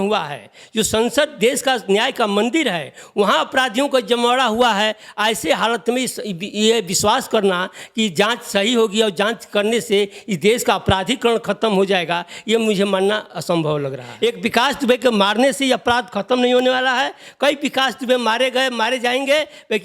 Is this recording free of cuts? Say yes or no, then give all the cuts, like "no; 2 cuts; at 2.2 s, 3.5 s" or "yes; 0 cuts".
no; 1 cut; at 14.0 s